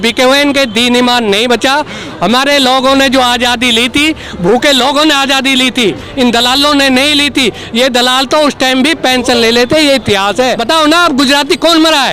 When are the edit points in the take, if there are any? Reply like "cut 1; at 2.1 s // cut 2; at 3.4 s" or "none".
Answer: cut 1; at 10.6 s